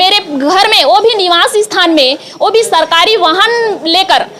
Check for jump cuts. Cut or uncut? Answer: uncut